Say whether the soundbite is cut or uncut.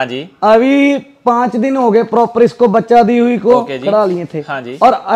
uncut